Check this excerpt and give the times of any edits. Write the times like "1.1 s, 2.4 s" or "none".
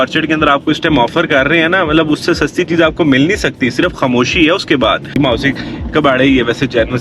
5.2 s